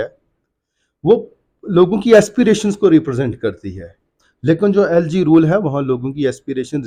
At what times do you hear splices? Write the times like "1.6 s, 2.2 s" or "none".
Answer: none